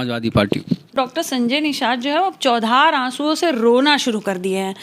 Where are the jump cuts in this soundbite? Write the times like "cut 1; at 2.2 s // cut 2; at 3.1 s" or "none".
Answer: cut 1; at 0.9 s